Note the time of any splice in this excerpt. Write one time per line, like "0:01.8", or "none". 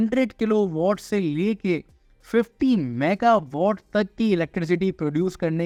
none

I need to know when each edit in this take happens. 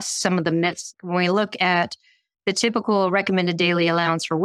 0:00.9

